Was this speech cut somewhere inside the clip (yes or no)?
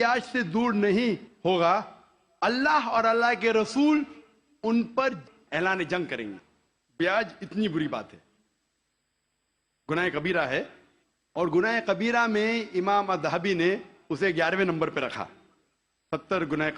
yes